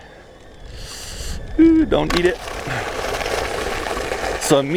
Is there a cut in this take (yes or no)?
no